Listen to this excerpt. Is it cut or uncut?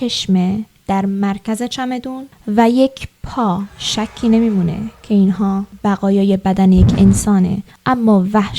cut